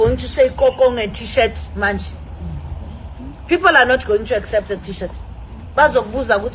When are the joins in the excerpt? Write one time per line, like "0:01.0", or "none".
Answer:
none